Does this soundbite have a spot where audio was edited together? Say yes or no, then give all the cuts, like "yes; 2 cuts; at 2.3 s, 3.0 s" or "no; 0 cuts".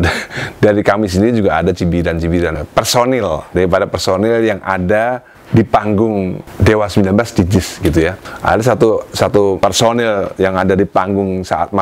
yes; 5 cuts; at 2.5 s, 5.3 s, 6.4 s, 8.3 s, 9.6 s